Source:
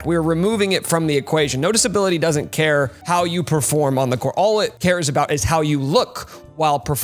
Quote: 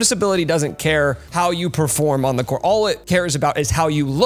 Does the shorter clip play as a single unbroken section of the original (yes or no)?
yes